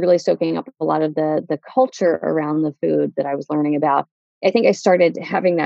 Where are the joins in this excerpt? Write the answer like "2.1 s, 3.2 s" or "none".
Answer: none